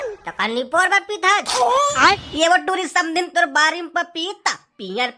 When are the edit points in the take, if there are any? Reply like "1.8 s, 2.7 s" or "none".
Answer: 1.9 s